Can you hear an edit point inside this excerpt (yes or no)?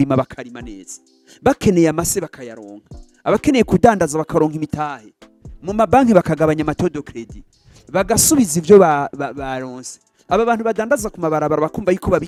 no